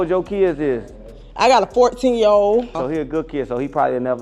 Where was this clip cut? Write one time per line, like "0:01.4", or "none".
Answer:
0:02.8

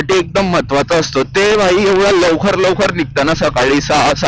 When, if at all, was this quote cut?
none

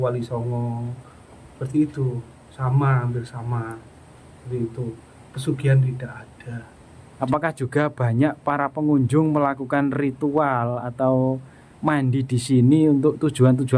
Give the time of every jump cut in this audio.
0:07.0

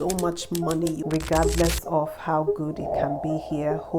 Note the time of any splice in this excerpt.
0:01.0

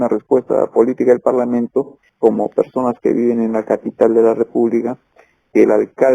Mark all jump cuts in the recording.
0:02.0

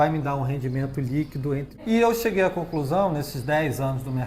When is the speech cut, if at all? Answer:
0:01.8

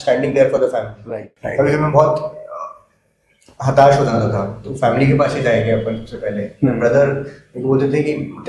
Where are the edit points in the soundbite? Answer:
0:00.9

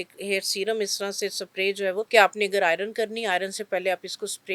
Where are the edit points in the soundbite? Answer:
0:02.1

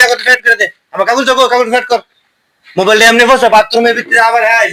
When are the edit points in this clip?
none

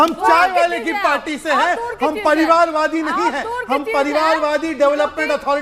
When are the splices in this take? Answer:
none

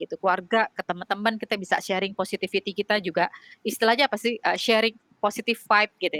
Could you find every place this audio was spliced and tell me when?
none

